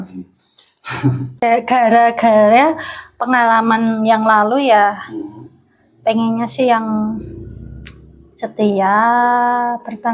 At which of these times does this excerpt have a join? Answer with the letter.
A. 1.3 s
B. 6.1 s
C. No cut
A